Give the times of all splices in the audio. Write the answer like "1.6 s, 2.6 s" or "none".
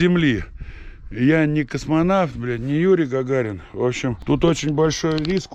4.2 s